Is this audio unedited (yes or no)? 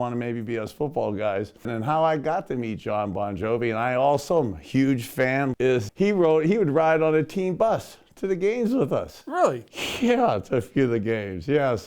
no